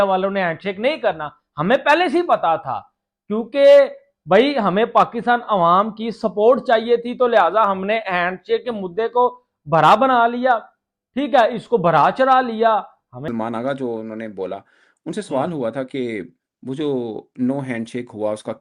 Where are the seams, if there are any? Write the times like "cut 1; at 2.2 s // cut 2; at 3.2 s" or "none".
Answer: cut 1; at 13.2 s